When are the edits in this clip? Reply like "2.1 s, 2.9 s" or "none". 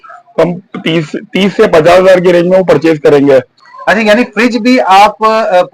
3.6 s